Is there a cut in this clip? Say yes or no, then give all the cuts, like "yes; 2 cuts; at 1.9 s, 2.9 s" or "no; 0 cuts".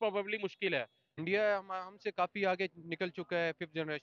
yes; 1 cut; at 1.0 s